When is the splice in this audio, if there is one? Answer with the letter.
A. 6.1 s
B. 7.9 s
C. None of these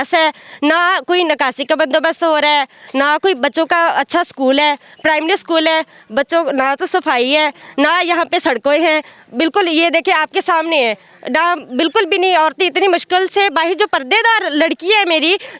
C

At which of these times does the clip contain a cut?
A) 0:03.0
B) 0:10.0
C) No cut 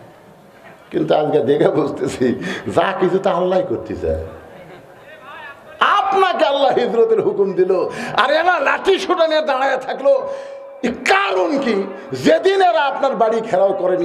C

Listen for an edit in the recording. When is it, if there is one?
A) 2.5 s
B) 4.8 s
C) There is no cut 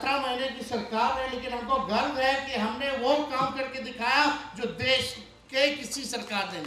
C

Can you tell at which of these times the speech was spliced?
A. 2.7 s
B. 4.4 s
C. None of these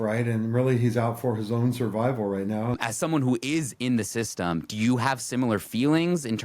A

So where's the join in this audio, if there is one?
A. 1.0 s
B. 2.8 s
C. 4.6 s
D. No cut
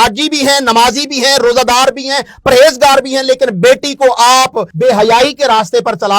C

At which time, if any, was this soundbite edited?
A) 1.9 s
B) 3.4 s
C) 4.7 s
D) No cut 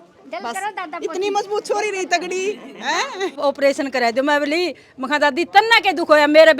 B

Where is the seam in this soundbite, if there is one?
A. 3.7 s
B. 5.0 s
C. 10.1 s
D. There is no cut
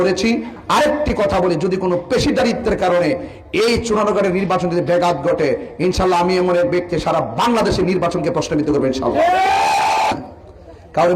C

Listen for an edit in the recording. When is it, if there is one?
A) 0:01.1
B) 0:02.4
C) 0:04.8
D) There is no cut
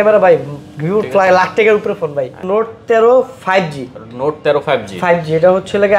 B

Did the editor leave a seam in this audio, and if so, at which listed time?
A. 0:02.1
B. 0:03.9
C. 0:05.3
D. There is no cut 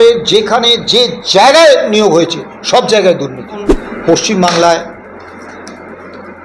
B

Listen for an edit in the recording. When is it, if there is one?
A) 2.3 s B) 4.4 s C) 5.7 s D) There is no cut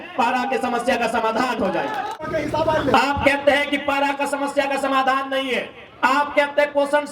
A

